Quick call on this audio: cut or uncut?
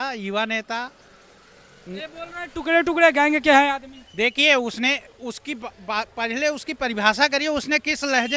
uncut